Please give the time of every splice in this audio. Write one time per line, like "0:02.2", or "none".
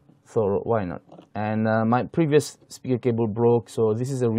none